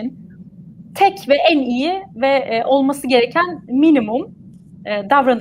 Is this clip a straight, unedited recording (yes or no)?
yes